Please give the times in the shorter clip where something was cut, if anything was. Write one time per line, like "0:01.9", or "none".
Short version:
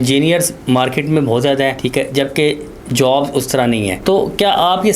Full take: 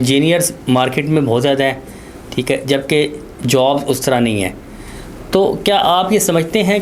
0:01.8
0:04.0